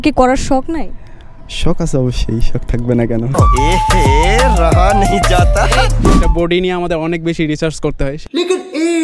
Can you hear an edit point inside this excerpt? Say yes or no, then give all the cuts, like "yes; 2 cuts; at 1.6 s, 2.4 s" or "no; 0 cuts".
yes; 1 cut; at 6.2 s